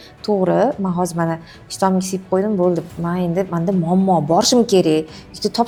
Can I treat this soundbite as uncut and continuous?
yes; 0 cuts

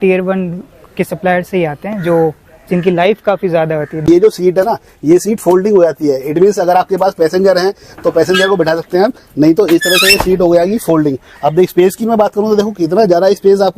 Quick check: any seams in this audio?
yes; 1 cut; at 4.1 s

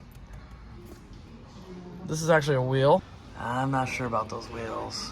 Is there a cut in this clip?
yes; 1 cut; at 3.2 s

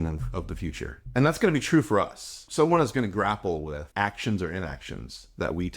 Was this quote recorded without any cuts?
no; 3 cuts; at 1.0 s, 2.4 s, 3.8 s

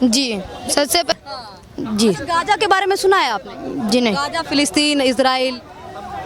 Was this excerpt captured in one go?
no; 1 cut; at 1.1 s

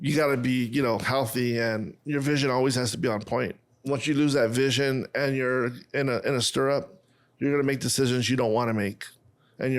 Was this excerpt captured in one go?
no; 2 cuts; at 1.9 s, 3.9 s

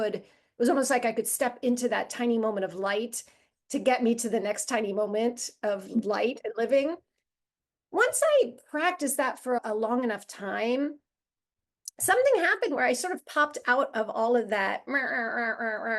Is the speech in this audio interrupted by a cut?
yes; 1 cut; at 9.6 s

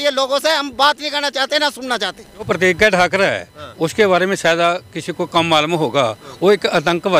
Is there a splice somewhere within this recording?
yes; 1 cut; at 2.5 s

